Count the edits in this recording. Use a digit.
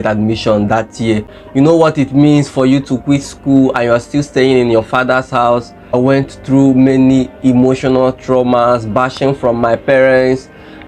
2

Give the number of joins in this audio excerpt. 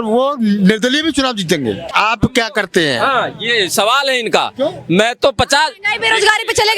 1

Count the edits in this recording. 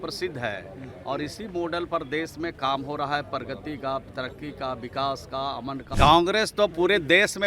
1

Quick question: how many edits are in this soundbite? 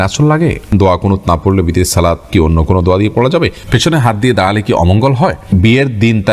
4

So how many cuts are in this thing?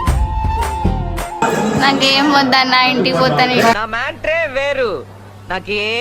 1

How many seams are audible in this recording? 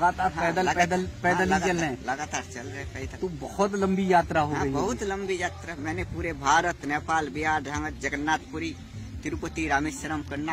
0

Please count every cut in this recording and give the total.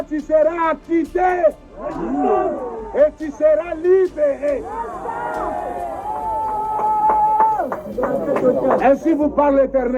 0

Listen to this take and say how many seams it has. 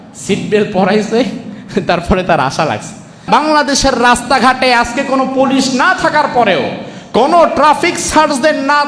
1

